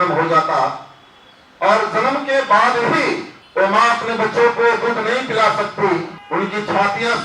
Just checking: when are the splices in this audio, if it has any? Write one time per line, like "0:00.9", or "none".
0:03.4
0:06.2